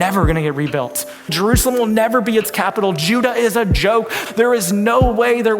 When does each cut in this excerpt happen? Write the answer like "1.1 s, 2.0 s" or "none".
1.3 s, 4.2 s